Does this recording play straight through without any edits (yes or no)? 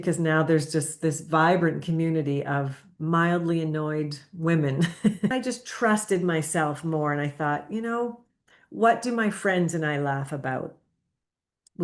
no